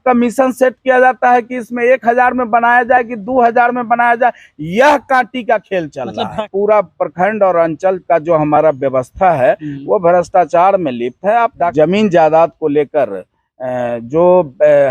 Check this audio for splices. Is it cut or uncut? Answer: cut